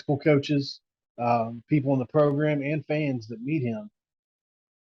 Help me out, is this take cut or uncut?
uncut